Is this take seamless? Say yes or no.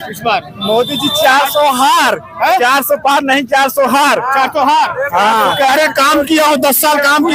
yes